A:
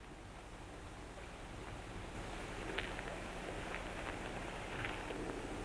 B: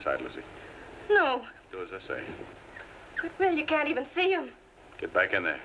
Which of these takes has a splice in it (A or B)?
A